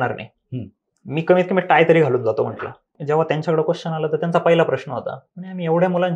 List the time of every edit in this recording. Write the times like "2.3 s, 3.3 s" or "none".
2.9 s